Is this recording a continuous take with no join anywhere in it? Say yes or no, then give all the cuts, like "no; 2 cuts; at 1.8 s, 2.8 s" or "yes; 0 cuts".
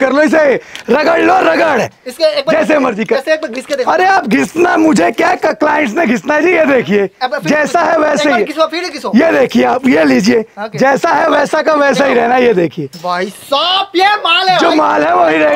yes; 0 cuts